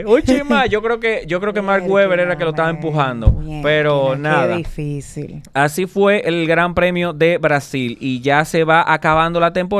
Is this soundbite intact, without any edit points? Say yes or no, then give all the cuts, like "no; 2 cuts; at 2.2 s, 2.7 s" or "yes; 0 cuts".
yes; 0 cuts